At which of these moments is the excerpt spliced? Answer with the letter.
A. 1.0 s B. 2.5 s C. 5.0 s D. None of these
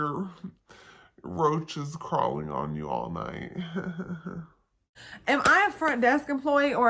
C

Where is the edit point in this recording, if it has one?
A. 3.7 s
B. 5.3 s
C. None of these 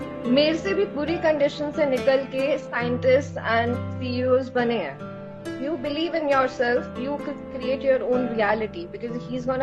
B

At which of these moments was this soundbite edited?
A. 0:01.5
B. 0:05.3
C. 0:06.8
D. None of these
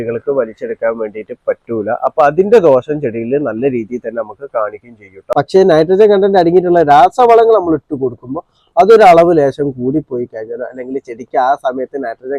B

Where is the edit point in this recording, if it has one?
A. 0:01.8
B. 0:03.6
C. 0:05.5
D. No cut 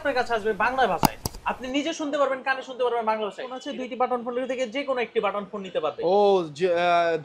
B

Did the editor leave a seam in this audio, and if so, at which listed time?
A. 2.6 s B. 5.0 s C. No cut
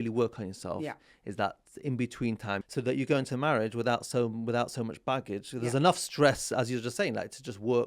A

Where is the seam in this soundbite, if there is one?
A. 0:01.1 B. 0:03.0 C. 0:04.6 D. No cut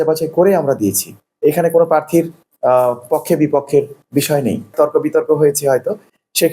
C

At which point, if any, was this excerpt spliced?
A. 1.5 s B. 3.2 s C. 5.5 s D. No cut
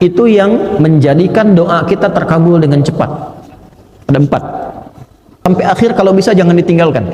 C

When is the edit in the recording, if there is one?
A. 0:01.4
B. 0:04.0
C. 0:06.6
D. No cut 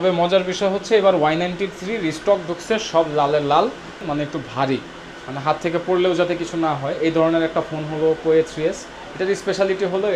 B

